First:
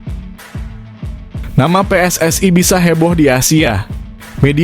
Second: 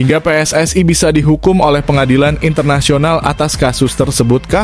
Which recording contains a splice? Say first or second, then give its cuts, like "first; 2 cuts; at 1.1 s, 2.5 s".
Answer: first; 1 cut; at 1.5 s